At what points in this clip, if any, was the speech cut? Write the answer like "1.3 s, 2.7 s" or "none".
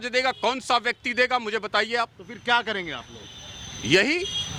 none